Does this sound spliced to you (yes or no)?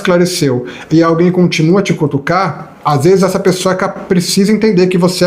yes